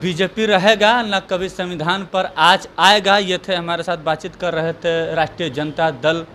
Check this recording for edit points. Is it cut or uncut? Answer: uncut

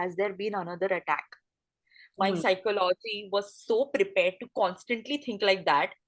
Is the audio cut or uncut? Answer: uncut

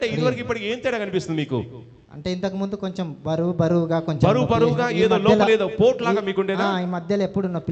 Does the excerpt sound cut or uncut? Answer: uncut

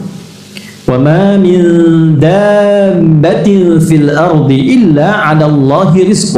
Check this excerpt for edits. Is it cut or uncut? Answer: uncut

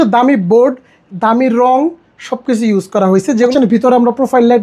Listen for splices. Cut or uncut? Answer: cut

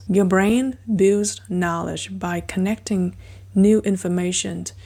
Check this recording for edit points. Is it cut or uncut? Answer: uncut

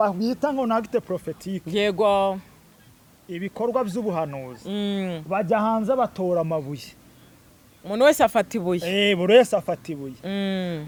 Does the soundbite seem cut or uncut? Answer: uncut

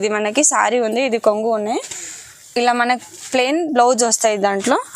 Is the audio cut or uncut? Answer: uncut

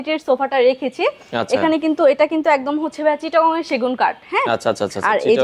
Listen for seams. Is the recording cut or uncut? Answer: uncut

